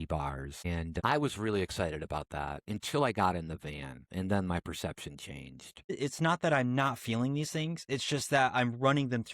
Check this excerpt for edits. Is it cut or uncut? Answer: cut